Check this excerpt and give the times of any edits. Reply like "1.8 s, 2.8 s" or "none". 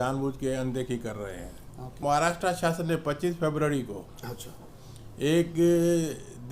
2.0 s